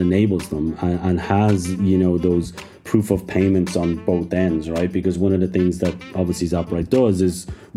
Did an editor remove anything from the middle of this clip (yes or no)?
no